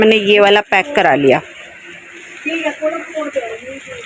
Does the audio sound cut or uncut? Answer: uncut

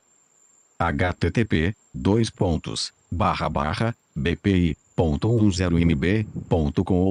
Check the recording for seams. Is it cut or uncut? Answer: uncut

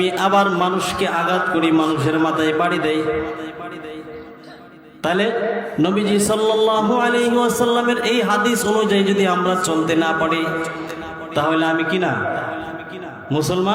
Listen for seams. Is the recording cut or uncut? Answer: uncut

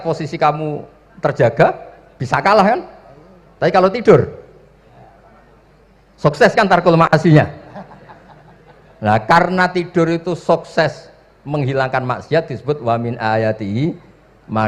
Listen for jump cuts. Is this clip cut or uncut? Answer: uncut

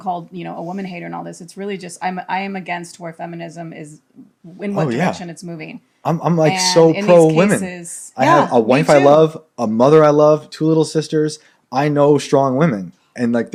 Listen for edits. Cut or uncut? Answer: uncut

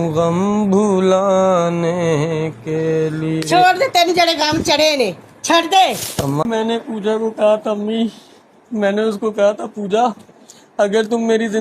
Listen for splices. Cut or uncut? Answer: cut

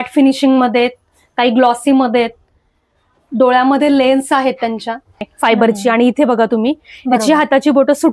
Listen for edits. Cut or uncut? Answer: cut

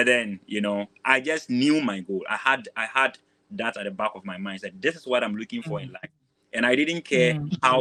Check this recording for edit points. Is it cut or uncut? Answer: uncut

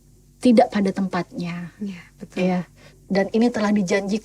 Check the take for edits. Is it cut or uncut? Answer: cut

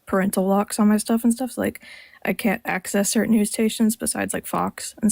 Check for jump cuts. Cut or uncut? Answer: uncut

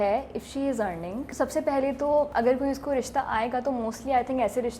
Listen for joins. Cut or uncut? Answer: cut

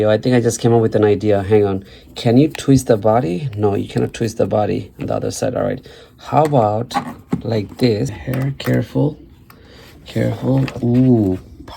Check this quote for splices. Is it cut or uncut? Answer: cut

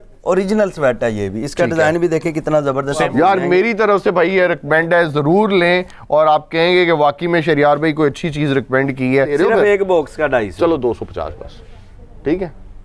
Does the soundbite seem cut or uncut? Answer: cut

